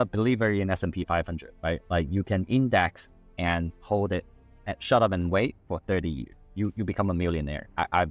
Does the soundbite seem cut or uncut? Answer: uncut